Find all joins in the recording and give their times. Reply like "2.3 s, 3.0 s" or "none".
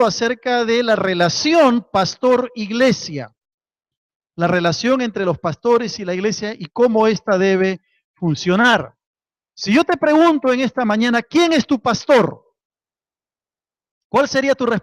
7.1 s